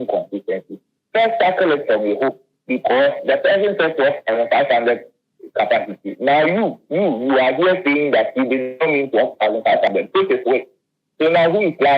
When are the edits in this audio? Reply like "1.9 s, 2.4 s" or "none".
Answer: none